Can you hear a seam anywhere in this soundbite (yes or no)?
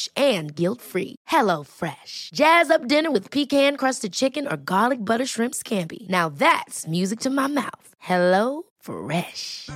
no